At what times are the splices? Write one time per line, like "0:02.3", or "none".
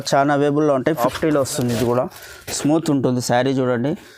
0:01.1